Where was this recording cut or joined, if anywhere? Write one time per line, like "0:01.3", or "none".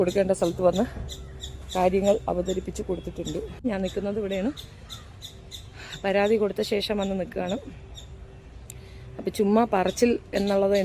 0:03.6

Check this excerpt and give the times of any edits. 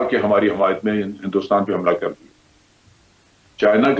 none

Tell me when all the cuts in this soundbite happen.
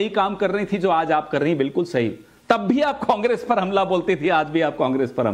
none

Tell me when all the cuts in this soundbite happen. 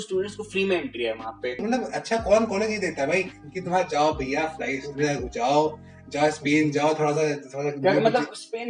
0:01.6

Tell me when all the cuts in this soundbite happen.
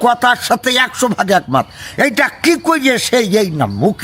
none

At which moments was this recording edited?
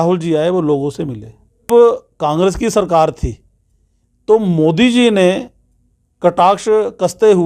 0:01.7

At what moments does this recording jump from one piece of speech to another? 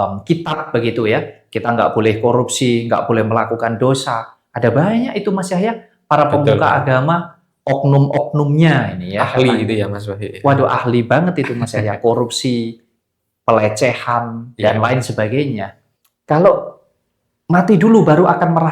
0:15.8

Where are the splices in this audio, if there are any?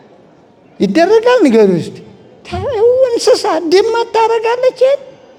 none

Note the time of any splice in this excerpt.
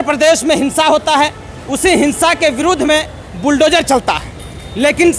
none

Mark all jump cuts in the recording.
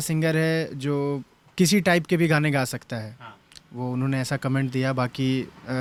none

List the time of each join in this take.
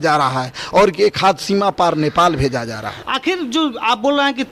none

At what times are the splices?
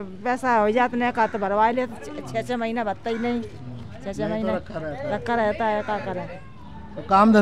none

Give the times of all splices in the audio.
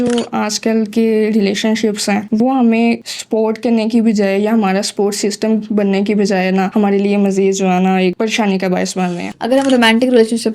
0:09.3

